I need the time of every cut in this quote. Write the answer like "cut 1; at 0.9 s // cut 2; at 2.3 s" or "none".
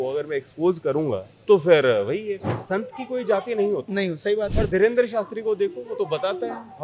cut 1; at 1.3 s // cut 2; at 2.6 s